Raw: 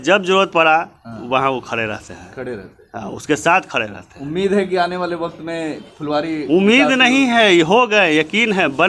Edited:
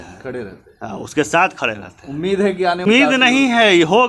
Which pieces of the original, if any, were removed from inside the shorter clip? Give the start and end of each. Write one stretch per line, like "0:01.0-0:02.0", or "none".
0:05.0-0:06.6